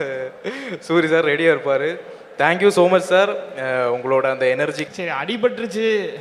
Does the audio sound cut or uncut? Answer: cut